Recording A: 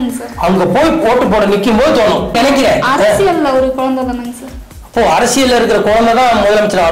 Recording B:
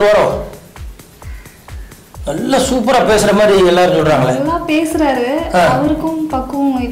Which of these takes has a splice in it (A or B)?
A